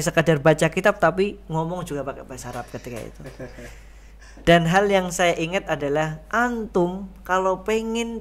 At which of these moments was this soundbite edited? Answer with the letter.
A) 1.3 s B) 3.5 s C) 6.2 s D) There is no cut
D